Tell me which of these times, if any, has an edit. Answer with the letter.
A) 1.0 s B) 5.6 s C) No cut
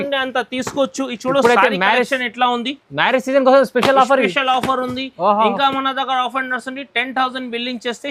C